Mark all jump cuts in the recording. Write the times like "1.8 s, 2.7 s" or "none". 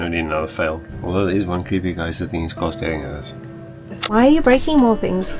4.1 s